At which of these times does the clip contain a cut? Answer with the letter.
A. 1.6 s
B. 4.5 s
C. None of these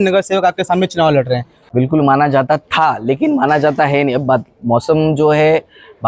A